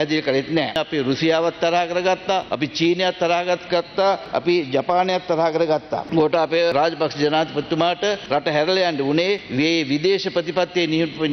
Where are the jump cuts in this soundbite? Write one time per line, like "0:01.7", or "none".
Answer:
0:00.8
0:02.5
0:04.2
0:06.0
0:06.7
0:08.2
0:09.5